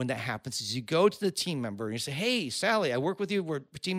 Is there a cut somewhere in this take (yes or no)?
no